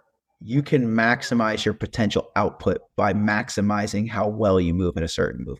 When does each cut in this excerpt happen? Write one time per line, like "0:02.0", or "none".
none